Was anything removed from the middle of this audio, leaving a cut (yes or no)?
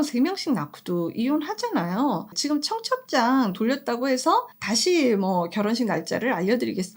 yes